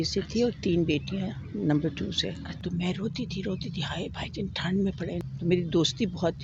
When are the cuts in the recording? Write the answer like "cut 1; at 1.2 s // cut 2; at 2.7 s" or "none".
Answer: cut 1; at 2.5 s // cut 2; at 5.2 s